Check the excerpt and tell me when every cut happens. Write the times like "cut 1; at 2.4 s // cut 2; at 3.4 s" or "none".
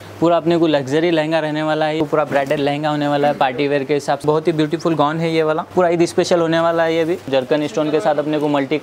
cut 1; at 2.0 s // cut 2; at 4.2 s // cut 3; at 5.7 s // cut 4; at 7.2 s